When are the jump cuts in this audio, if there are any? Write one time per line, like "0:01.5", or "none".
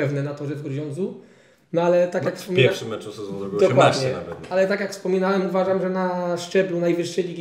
none